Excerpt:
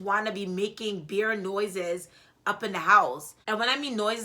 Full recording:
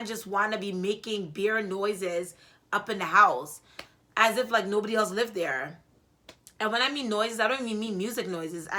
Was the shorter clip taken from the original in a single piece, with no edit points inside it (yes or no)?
no